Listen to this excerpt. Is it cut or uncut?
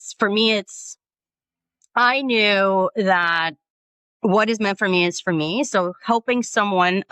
uncut